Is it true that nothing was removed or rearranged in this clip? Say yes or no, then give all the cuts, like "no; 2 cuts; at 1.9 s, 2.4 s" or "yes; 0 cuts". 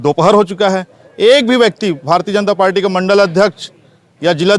yes; 0 cuts